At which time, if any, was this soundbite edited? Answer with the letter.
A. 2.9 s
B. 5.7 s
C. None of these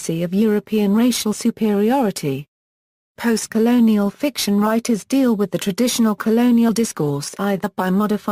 B